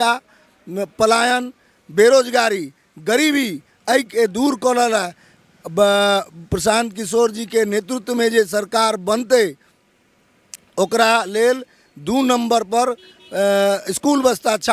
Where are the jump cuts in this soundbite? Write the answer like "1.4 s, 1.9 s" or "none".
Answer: none